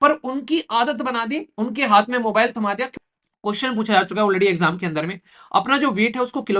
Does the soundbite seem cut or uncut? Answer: cut